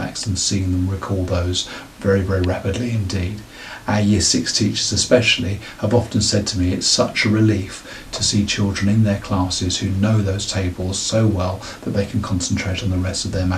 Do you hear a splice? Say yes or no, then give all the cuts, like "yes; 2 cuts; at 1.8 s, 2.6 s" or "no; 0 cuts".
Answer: no; 0 cuts